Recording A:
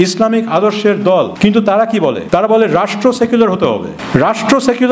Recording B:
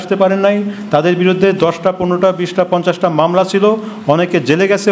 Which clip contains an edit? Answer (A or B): A